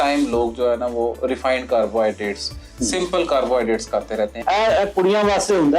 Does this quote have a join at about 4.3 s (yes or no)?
yes